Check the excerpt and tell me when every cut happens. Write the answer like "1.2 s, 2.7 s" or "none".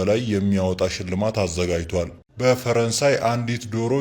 2.2 s